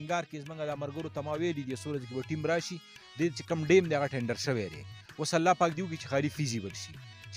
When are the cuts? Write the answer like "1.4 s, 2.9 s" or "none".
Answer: none